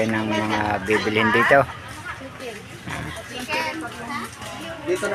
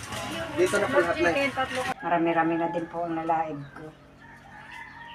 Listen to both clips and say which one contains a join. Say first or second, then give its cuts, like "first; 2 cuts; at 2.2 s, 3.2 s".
second; 1 cut; at 1.9 s